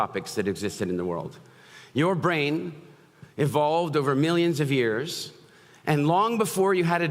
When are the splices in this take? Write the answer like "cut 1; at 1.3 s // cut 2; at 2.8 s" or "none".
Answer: none